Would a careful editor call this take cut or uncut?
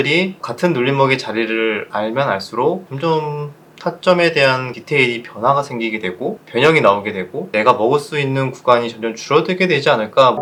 uncut